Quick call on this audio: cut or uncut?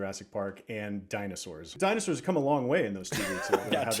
cut